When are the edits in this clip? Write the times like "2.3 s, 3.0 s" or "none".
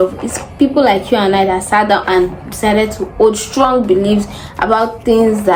none